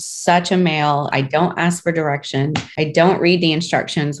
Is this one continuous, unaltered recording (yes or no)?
no